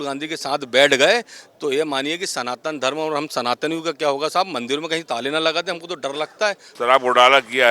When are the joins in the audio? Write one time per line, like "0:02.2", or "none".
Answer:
0:06.7